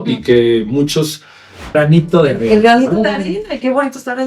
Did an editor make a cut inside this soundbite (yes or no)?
yes